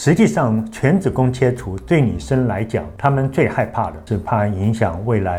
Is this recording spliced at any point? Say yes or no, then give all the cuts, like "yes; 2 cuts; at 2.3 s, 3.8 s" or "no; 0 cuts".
no; 0 cuts